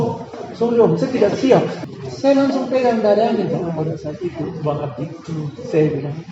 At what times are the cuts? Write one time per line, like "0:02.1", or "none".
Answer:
0:01.8